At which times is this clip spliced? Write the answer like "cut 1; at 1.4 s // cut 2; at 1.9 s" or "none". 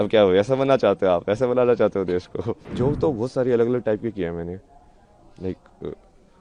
cut 1; at 2.6 s